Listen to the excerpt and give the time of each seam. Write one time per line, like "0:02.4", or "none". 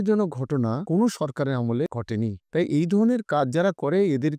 0:00.8
0:01.9